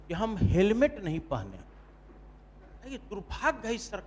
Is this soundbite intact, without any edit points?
yes; 0 cuts

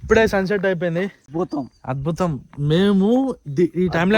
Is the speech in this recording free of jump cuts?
no; 1 cut; at 1.2 s

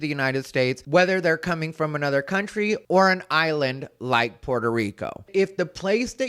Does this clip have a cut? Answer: yes; 1 cut; at 5.2 s

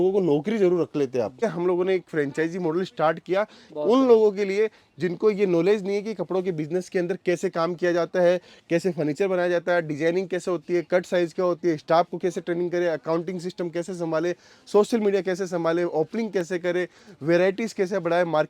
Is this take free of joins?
no; 1 cut; at 1.4 s

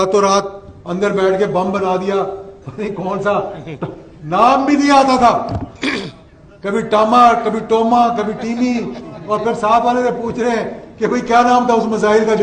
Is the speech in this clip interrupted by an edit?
no; 0 cuts

